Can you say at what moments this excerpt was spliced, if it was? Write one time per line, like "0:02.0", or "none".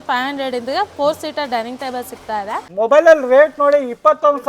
0:02.6